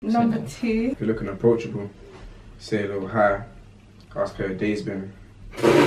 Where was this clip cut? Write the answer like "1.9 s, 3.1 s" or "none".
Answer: 1.0 s

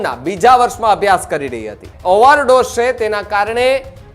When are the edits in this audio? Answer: 1.9 s

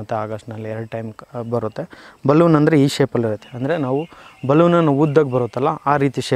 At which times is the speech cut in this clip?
none

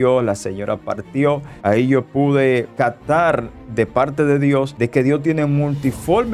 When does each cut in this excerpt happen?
1.5 s

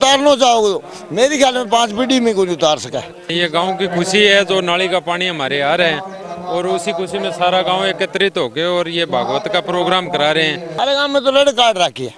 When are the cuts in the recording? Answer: 3.3 s, 10.7 s

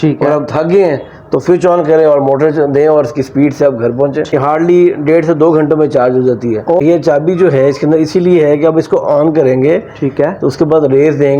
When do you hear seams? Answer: 4.3 s, 6.6 s

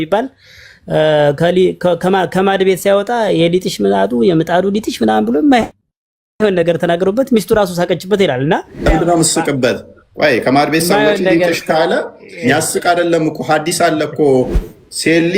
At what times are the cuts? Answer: 8.9 s

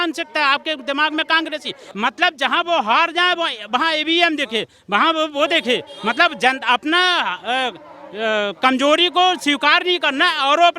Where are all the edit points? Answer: 1.8 s

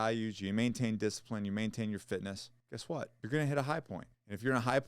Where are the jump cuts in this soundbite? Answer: 3.1 s

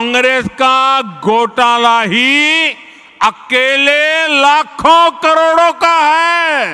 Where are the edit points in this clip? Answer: none

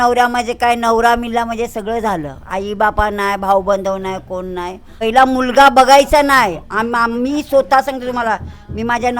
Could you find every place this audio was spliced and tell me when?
4.9 s

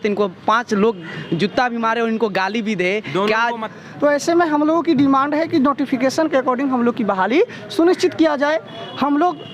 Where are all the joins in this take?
3.6 s

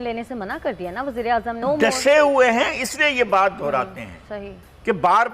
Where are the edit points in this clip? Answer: 1.6 s

